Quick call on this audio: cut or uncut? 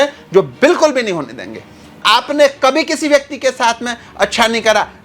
cut